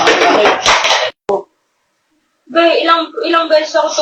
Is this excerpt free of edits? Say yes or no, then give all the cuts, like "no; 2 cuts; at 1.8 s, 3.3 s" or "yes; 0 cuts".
no; 1 cut; at 1.1 s